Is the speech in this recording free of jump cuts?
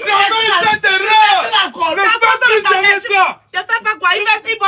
yes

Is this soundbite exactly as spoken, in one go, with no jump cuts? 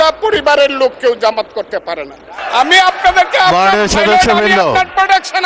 no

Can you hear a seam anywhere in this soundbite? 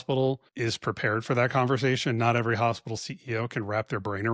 no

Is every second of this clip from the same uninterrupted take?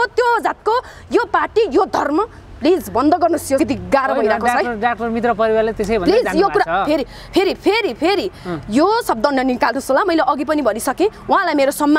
no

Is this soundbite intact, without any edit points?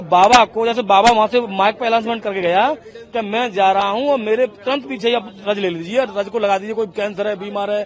yes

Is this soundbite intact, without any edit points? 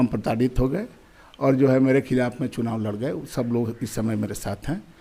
yes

